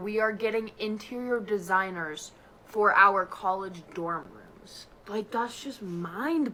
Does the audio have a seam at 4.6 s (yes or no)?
no